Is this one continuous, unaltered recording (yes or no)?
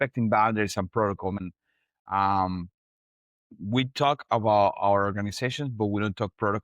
no